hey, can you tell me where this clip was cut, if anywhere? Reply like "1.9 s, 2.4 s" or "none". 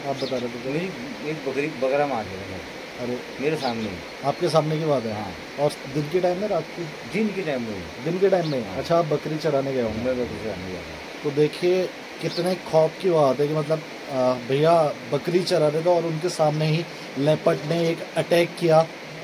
none